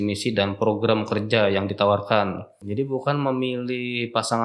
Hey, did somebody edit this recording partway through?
yes; 1 cut; at 2.6 s

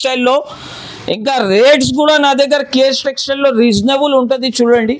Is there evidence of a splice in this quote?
no; 0 cuts

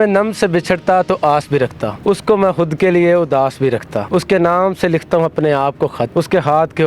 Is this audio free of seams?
no; 3 cuts; at 1.9 s, 4.1 s, 6.1 s

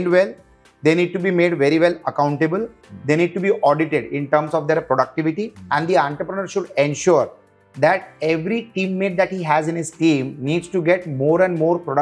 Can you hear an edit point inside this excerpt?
no; 0 cuts

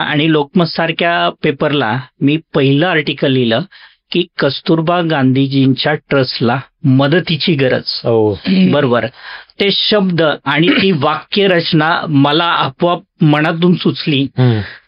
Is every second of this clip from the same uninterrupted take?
yes; 0 cuts

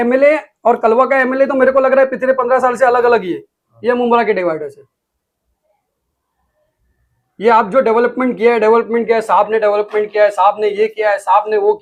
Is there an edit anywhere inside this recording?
no; 0 cuts

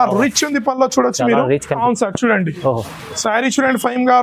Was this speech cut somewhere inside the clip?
yes; 1 cut; at 1.8 s

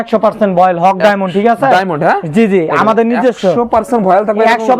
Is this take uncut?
yes; 0 cuts

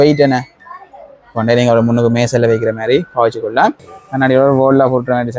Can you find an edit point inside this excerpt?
yes; 1 cut; at 3.9 s

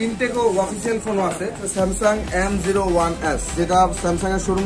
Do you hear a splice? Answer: yes; 2 cuts; at 1.6 s, 3.5 s

